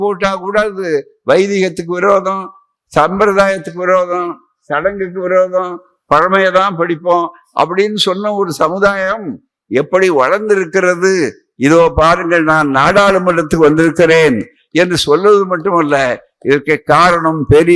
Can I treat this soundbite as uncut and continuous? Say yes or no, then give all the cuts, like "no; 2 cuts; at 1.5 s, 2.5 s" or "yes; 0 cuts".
yes; 0 cuts